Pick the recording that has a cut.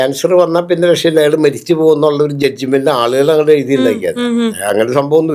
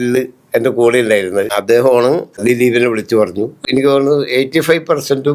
second; 3 cuts; at 1.5 s, 2.4 s, 3.6 s

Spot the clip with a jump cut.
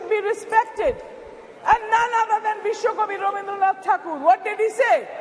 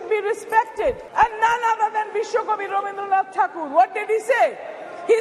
second; 1 cut; at 1.0 s

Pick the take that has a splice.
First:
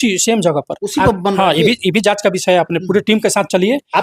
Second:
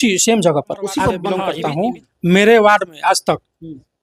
second; 1 cut; at 1.4 s

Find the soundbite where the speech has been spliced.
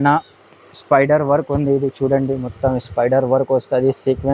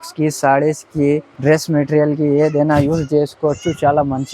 second; 1 cut; at 1.3 s

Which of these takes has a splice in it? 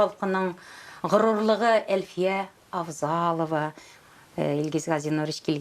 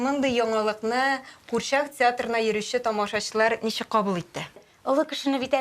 second; 1 cut; at 4.7 s

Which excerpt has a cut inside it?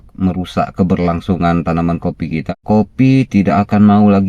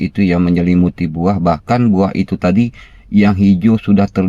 first; 1 cut; at 2.4 s

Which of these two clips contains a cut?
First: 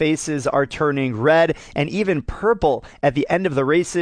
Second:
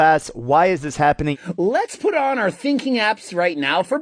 second; 1 cut; at 1.4 s

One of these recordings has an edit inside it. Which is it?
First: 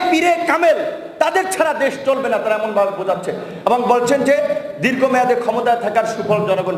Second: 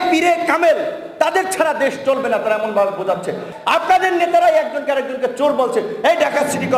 second; 1 cut; at 3.5 s

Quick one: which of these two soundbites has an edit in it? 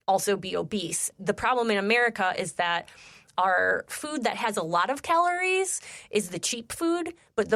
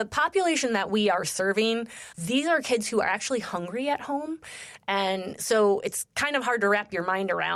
first; 1 cut; at 1.0 s

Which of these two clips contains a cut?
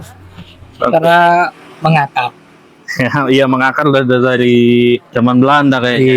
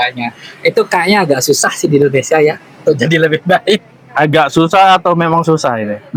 first; 1 cut; at 5.1 s

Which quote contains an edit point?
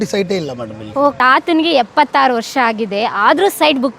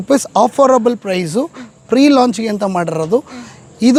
first; 1 cut; at 1.2 s

